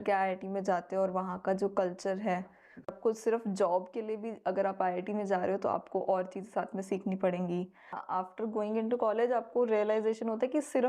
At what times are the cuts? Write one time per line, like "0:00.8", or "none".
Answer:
0:02.9
0:08.0